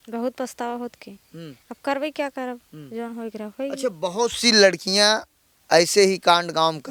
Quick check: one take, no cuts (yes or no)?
yes